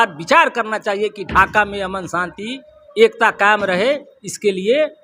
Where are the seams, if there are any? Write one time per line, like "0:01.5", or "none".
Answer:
none